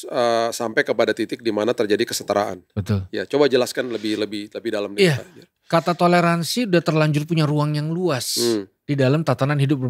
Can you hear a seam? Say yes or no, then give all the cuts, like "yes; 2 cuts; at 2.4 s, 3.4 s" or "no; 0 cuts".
no; 0 cuts